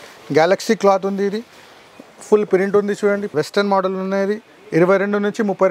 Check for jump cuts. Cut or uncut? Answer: cut